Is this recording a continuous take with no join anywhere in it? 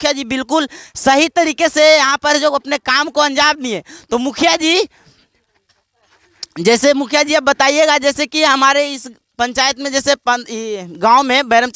yes; 0 cuts

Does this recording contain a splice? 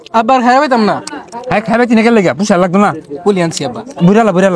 no; 0 cuts

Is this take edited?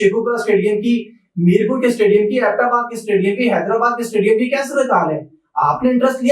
no; 0 cuts

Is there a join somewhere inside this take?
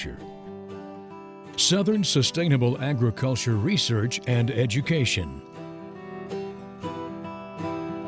yes; 1 cut; at 5.4 s

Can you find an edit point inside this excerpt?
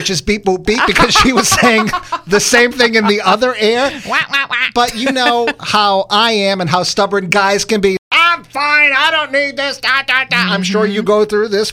yes; 1 cut; at 8.0 s

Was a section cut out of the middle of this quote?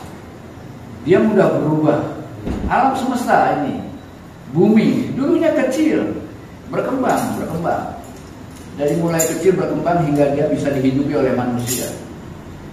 yes; 1 cut; at 2.6 s

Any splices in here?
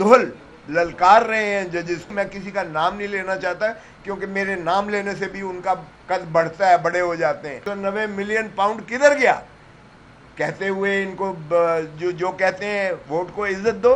yes; 2 cuts; at 2.1 s, 7.7 s

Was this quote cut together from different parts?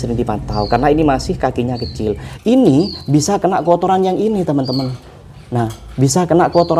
yes; 1 cut; at 2.3 s

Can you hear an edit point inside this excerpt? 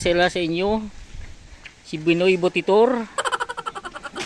no; 0 cuts

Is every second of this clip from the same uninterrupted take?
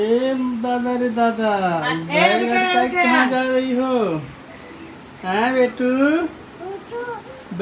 yes; 0 cuts

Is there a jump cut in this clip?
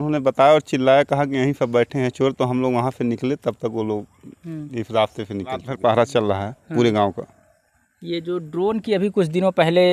yes; 1 cut; at 5.7 s

